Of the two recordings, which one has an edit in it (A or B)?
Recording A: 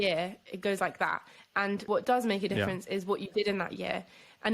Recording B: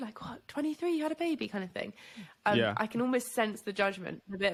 A